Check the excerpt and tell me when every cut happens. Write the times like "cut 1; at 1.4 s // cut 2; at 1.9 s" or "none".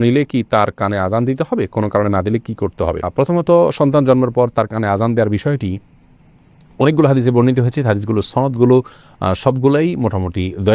none